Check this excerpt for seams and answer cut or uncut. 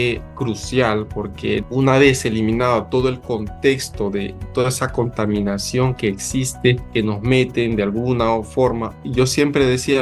cut